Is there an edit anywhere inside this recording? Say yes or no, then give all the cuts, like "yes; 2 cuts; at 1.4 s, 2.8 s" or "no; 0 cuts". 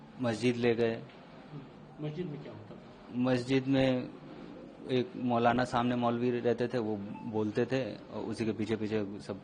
no; 0 cuts